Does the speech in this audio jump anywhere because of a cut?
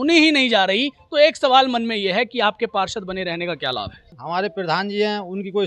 yes; 1 cut; at 4.1 s

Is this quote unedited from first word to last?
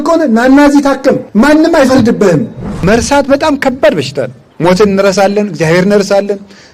no; 3 cuts; at 1.2 s, 2.8 s, 4.4 s

